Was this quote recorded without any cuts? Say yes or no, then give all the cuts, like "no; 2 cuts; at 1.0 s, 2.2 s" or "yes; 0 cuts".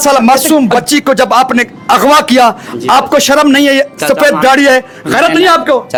yes; 0 cuts